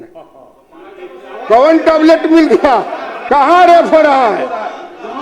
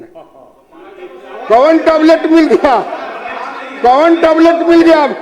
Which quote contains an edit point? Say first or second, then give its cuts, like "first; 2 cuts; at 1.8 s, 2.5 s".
first; 1 cut; at 3.1 s